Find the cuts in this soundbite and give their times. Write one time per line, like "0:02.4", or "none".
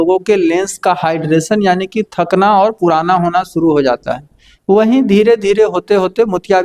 none